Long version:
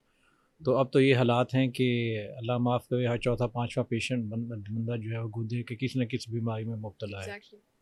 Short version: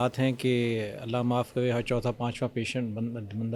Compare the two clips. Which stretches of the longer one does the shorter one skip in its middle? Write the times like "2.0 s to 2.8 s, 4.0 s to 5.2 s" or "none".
none

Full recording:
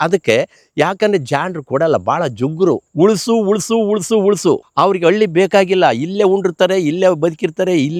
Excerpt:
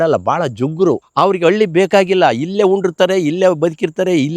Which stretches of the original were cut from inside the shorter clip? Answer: 2.9 s to 4.7 s

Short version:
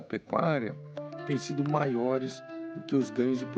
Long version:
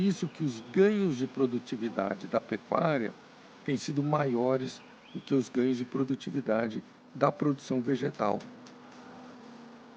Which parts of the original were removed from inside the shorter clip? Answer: none

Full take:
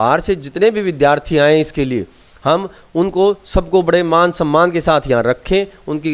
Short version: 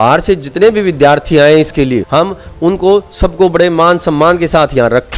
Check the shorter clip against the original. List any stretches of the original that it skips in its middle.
2.1 s to 2.4 s

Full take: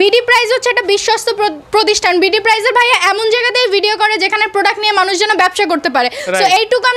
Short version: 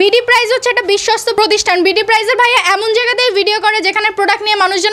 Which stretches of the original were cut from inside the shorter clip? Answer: 1.3 s to 1.7 s

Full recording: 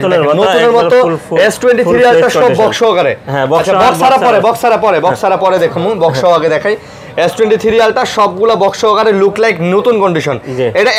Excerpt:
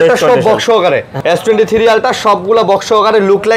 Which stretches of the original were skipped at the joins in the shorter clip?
3.2 s to 7.0 s

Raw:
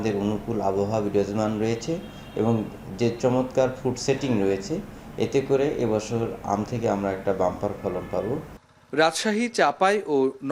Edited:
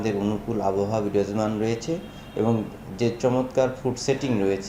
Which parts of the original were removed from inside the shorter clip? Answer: none

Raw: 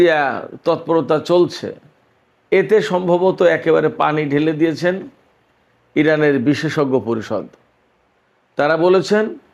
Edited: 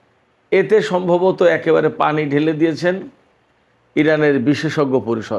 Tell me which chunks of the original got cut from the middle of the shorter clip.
none

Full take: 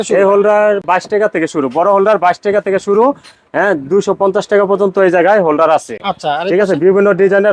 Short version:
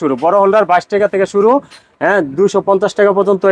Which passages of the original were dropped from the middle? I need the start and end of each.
none

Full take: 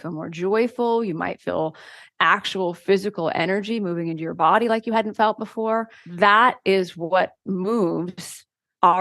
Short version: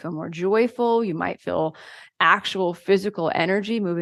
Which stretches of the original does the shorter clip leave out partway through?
none

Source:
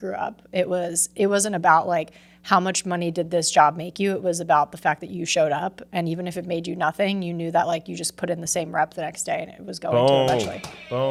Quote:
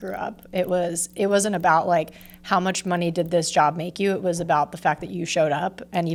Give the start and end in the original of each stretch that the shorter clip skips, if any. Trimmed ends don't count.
none

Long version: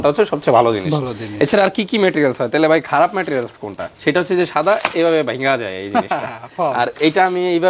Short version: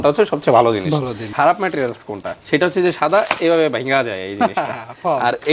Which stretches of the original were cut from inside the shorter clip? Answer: 1.3 s to 2.9 s

